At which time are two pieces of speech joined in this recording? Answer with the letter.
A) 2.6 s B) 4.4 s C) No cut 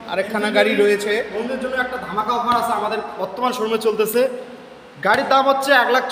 C